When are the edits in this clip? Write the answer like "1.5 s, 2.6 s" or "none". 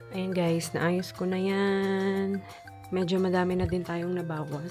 none